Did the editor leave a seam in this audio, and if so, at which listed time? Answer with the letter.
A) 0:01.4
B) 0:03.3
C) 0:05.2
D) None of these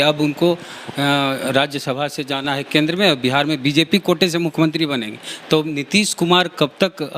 D